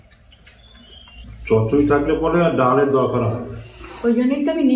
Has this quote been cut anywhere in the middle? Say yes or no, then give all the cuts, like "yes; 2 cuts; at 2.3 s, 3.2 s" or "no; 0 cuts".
yes; 1 cut; at 1.1 s